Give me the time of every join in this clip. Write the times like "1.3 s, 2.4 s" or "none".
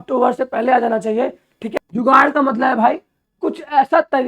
1.6 s